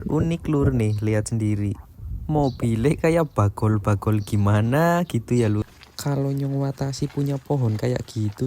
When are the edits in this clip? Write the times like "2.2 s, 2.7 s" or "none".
5.6 s

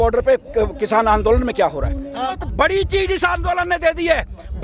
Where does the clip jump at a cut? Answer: 2.4 s

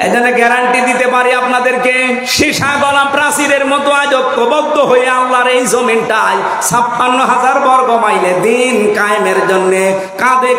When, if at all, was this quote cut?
1.1 s

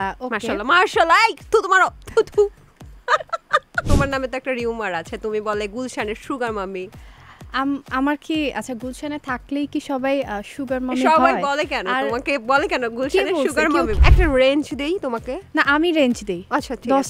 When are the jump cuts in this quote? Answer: 3.9 s, 14.0 s

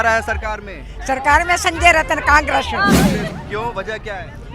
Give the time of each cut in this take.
3.3 s

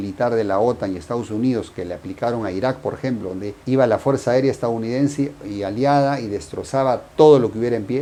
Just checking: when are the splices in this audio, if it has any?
none

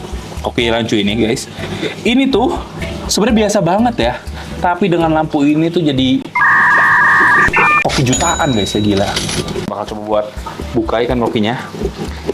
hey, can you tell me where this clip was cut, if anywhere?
9.7 s

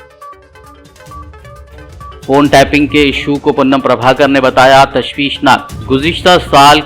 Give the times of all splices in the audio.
1.6 s

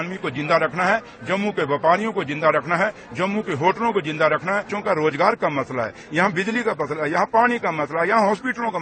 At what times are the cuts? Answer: 4.7 s

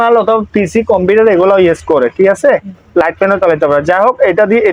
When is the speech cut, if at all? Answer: none

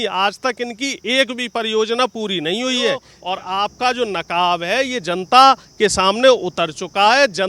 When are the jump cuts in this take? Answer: 3.1 s

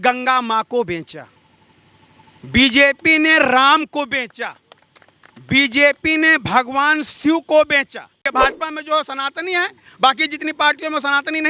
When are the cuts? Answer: 8.3 s

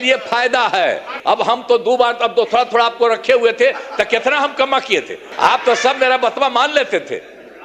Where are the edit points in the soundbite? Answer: 1.1 s, 5.2 s

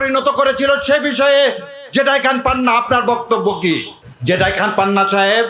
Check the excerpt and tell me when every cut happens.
4.0 s

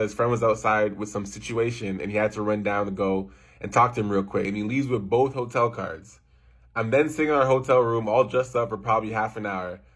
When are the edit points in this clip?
4.5 s

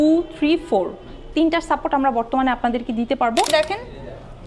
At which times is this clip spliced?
3.5 s

